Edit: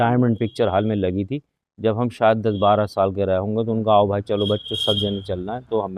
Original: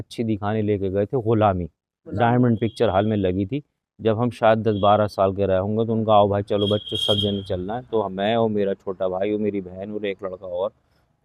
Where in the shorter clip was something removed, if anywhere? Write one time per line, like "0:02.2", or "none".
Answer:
none